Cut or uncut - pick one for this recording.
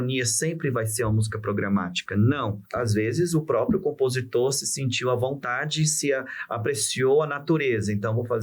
cut